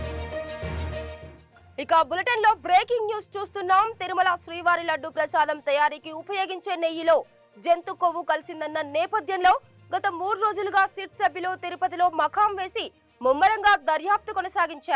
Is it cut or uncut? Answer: cut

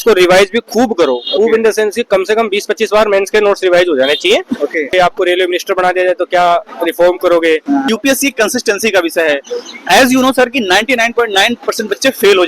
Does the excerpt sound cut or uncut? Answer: cut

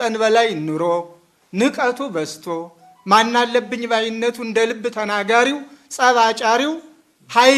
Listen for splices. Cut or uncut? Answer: uncut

